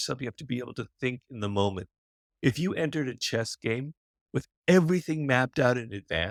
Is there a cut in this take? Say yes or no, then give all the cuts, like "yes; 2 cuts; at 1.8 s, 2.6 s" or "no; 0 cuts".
no; 0 cuts